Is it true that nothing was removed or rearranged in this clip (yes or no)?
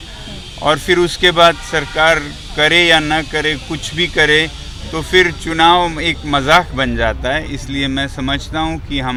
yes